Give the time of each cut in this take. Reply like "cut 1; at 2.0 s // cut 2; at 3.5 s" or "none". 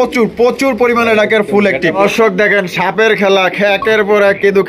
cut 1; at 1.9 s